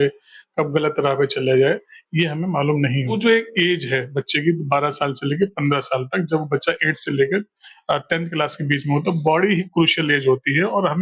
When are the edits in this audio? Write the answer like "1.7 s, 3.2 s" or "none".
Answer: 3.2 s